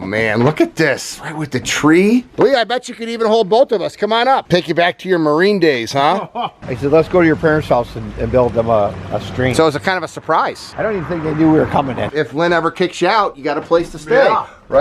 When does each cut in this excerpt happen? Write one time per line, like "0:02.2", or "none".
0:02.3
0:04.4
0:06.7
0:12.1